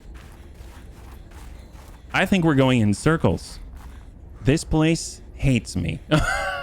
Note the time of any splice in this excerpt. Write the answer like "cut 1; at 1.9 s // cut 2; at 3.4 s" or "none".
cut 1; at 2.0 s